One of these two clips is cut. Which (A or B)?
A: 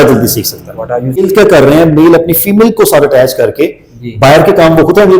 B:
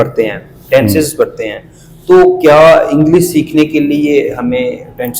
A